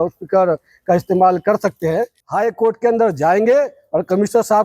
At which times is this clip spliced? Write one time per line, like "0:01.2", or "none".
0:02.2